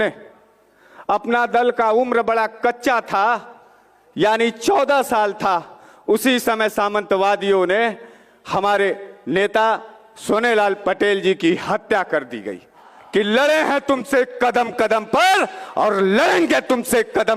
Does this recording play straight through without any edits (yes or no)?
no